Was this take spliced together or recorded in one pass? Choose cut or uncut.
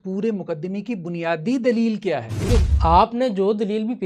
cut